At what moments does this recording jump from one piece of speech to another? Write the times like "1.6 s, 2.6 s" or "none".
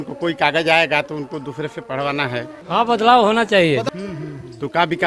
2.6 s, 3.8 s